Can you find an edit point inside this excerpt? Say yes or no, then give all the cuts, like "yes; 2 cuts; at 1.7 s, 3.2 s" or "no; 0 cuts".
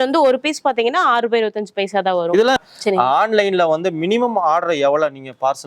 yes; 1 cut; at 2.6 s